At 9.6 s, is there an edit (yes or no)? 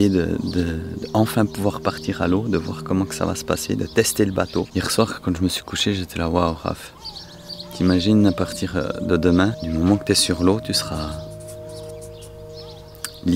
yes